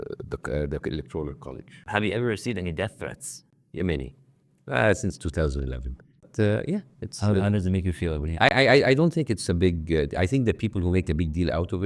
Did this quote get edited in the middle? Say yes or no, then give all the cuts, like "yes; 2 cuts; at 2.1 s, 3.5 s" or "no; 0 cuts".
yes; 2 cuts; at 1.9 s, 6.3 s